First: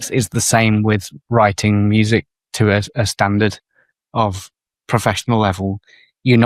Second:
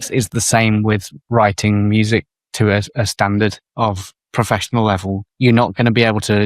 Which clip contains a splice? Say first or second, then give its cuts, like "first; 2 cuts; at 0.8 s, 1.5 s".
second; 2 cuts; at 3.9 s, 5.3 s